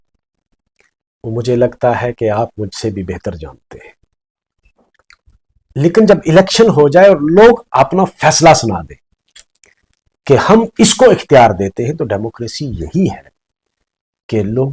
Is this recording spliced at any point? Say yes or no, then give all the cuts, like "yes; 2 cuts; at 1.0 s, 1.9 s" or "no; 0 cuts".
yes; 1 cut; at 5.1 s